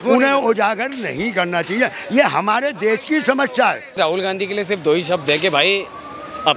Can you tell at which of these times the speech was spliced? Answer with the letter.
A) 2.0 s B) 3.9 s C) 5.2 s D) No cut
B